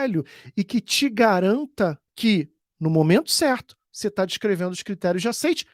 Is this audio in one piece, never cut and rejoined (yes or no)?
no